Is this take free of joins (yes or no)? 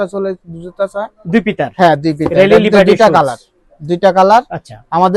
yes